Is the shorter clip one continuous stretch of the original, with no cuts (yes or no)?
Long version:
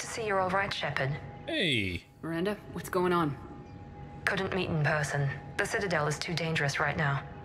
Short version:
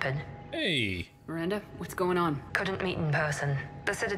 no